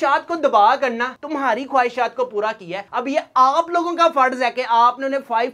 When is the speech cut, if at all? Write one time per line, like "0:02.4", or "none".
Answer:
none

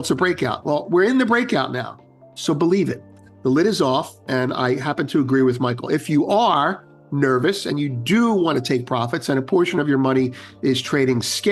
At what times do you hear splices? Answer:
none

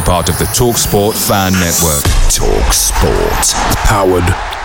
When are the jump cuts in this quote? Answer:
none

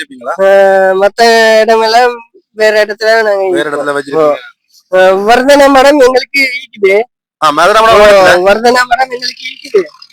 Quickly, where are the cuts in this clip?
none

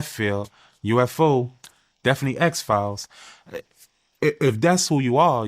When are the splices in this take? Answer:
0:01.1

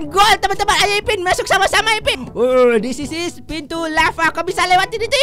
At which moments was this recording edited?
0:02.2

